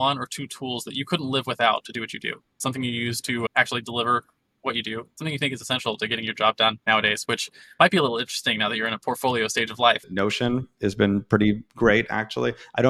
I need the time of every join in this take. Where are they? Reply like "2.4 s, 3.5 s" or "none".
2.6 s, 10.0 s